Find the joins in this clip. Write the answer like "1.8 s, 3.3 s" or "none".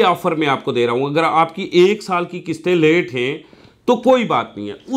none